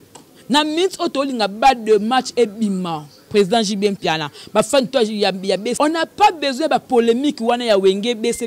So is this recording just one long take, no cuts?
no; 1 cut; at 5.7 s

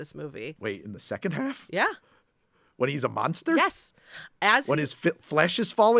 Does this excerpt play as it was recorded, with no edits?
yes; 0 cuts

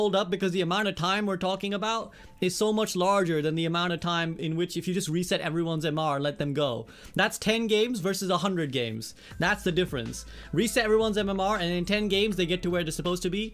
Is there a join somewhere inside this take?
no; 0 cuts

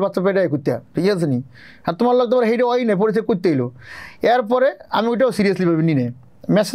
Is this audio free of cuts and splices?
yes; 0 cuts

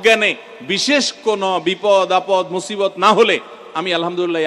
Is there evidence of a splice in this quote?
no; 0 cuts

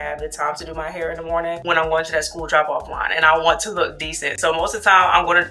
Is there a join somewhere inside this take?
no; 0 cuts

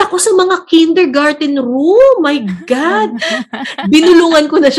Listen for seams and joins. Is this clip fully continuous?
no; 1 cut; at 3.7 s

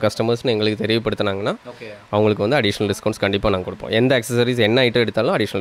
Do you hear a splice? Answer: no; 0 cuts

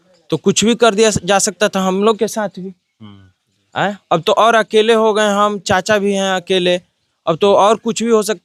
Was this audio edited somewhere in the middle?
no; 0 cuts

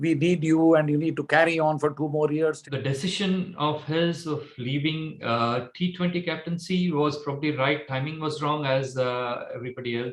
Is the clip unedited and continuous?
no; 1 cut; at 2.7 s

